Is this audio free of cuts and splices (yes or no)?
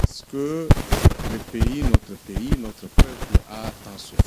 yes